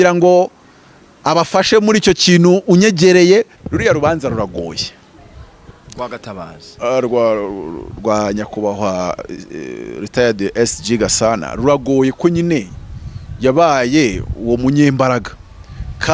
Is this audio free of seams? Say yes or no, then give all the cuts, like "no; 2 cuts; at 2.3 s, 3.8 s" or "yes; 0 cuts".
no; 1 cut; at 3.6 s